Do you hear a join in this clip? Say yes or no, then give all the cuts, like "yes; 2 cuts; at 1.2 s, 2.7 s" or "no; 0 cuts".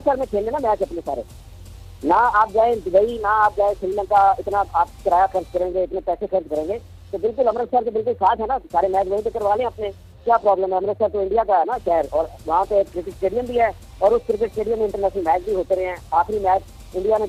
no; 0 cuts